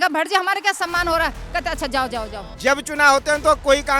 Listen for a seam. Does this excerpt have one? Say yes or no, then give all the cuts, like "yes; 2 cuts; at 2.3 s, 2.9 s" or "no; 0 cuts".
yes; 1 cut; at 2.4 s